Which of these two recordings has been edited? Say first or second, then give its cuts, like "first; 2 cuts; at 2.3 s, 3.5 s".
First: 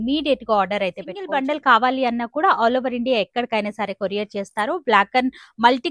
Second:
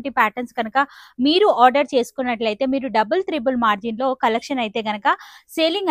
first; 1 cut; at 1.2 s